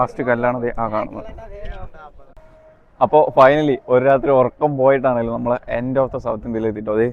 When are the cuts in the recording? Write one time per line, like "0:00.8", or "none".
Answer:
0:02.4